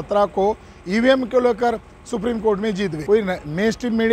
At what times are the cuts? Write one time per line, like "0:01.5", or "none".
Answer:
0:03.0